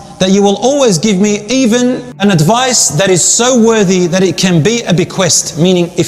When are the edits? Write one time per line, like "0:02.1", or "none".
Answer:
0:02.1